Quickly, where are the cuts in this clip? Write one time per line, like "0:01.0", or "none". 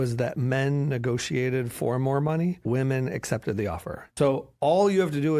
0:02.6
0:04.0